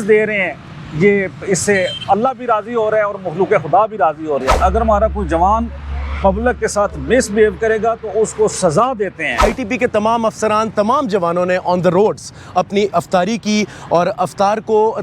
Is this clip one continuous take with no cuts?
no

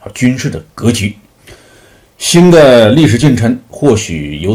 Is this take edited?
no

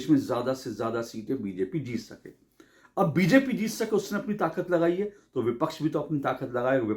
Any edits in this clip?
no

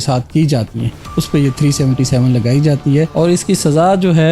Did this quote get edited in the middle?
yes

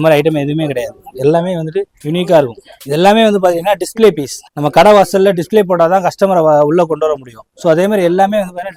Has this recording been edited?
no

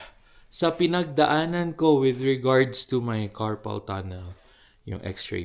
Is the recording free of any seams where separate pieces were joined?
yes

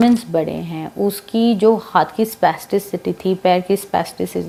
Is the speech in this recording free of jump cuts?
yes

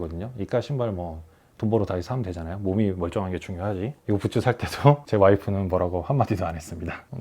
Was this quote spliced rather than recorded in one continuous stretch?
yes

